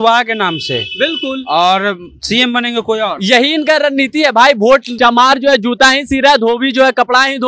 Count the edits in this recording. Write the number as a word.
one